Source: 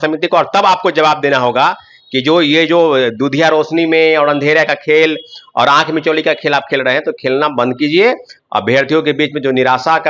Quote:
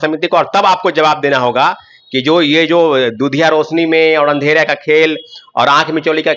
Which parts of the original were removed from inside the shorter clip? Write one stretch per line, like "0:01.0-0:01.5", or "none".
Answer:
none

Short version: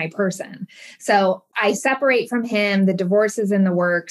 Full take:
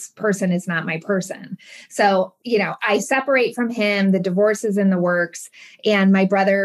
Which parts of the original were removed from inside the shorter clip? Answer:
0:02.4-0:02.7

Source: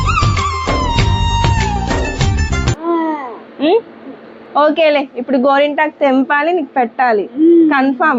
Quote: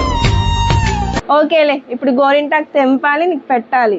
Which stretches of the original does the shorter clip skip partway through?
0:01.9-0:04.5

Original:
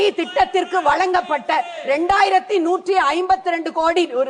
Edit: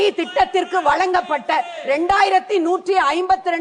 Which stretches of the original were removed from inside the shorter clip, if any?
none

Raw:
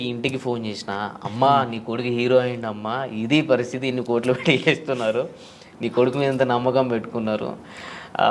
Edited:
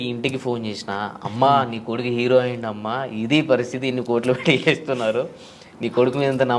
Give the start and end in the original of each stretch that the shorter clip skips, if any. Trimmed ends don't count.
none

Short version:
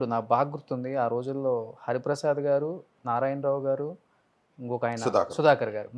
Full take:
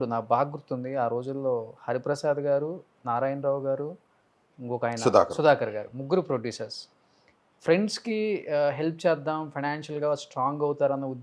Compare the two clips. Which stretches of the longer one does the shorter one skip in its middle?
none

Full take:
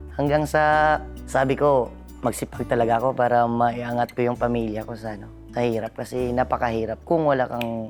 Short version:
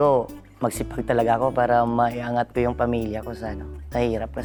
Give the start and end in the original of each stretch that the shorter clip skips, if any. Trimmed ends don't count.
none

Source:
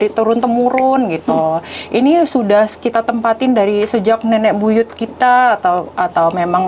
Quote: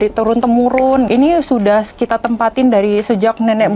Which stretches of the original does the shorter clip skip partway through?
0:01.1-0:01.9

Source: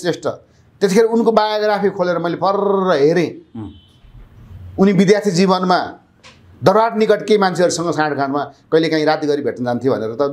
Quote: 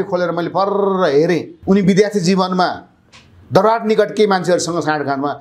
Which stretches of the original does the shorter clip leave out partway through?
0:03.4-0:04.6

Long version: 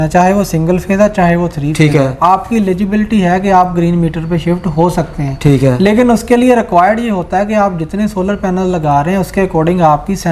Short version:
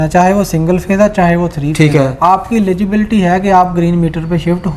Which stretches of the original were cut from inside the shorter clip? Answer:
none

